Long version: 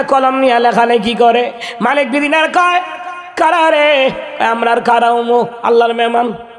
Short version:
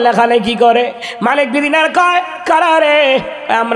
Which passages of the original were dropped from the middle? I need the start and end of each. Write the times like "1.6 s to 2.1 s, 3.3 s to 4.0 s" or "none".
2.9 s to 3.3 s